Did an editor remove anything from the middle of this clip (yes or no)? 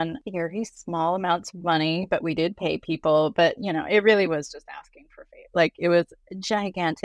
no